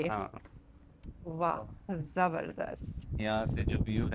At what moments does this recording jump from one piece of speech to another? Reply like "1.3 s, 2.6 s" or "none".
none